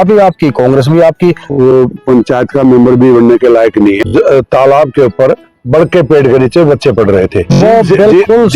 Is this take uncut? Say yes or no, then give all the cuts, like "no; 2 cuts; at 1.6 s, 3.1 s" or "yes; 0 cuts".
no; 3 cuts; at 1.5 s, 4.0 s, 7.6 s